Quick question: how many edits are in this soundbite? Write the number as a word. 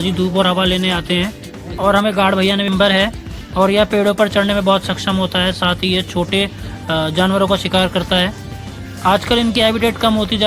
one